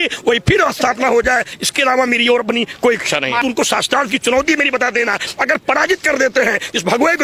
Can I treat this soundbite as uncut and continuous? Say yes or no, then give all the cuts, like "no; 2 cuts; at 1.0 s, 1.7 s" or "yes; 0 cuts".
no; 1 cut; at 3.4 s